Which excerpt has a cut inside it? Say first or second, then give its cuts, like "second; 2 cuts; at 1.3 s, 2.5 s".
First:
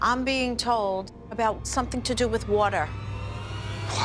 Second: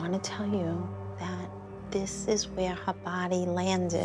second; 1 cut; at 1.7 s